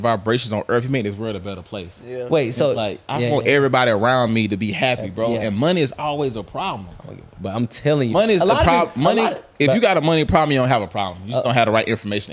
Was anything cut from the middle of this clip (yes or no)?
no